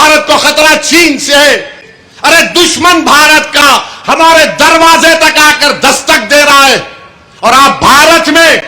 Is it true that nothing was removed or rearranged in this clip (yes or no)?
no